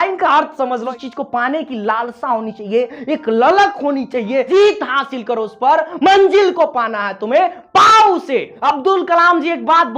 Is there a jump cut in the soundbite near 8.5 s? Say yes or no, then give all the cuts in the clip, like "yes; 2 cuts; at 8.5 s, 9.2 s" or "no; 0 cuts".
yes; 3 cuts; at 0.9 s, 4.5 s, 8.5 s